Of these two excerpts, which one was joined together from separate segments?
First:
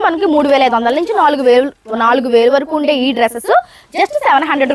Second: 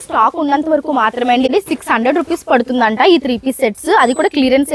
second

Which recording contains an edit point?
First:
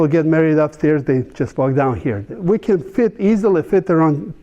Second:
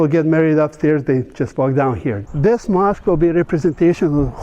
second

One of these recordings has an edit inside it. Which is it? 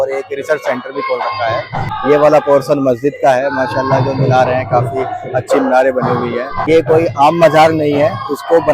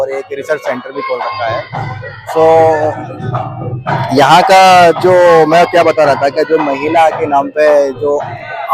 first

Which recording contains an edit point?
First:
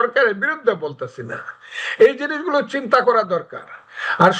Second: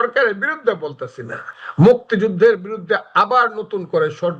second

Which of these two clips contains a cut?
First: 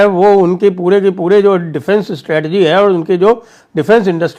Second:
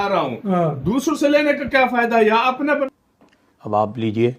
second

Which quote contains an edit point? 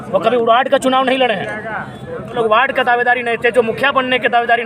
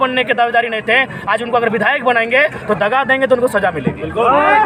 first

